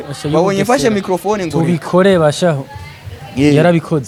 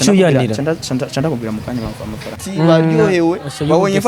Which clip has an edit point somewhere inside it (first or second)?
second